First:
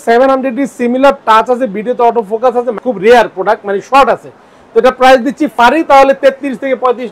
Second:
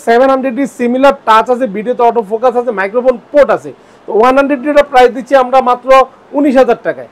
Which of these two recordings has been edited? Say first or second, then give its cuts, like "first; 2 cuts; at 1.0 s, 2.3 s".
first; 2 cuts; at 2.8 s, 5.5 s